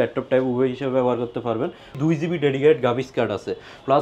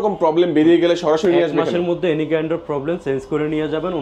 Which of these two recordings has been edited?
first; 1 cut; at 2.0 s

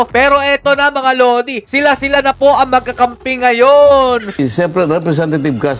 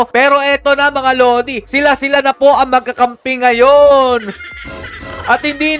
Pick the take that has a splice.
first; 1 cut; at 4.4 s

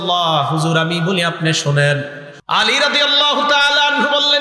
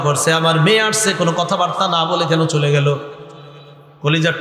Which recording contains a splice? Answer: first; 1 cut; at 2.3 s

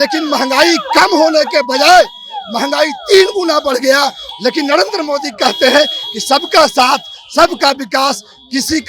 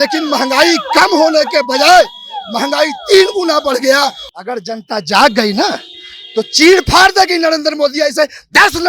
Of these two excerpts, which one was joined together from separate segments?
second; 1 cut; at 4.2 s

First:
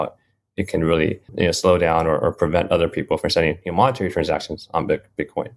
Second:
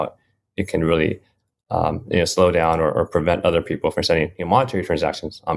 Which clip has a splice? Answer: first; 1 cut; at 1.3 s

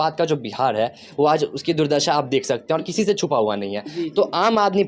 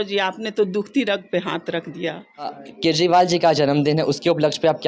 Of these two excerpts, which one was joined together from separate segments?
second; 1 cut; at 2.6 s

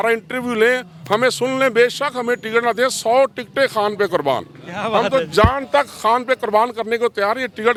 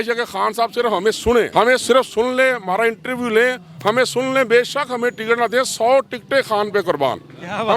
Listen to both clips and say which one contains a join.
second; 1 cut; at 1.5 s

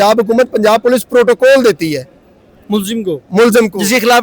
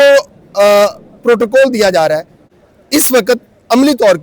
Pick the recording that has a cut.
second; 1 cut; at 2.4 s

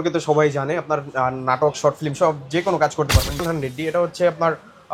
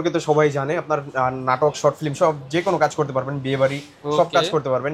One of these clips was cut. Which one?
first; 1 cut; at 3.4 s

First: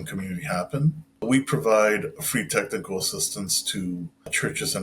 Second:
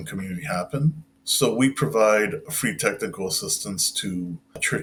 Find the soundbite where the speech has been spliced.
first; 1 cut; at 1.2 s

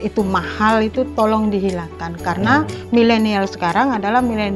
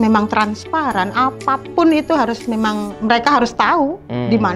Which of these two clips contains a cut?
second; 1 cut; at 2.9 s

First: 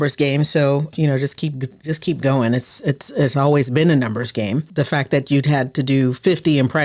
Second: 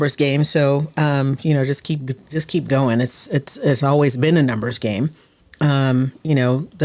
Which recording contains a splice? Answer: first; 2 cuts; at 0.9 s, 4.7 s

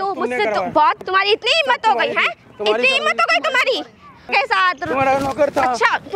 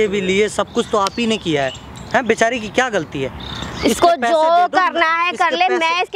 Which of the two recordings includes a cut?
first; 2 cuts; at 1.0 s, 4.3 s

